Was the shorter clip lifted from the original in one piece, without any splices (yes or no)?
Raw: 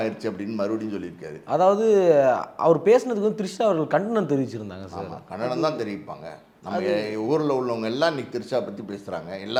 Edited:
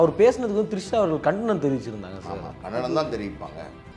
yes